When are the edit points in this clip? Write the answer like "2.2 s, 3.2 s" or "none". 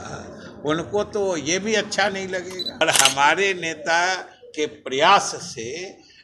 2.8 s